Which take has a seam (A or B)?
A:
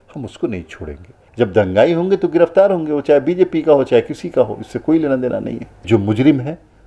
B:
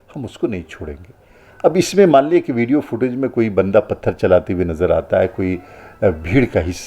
A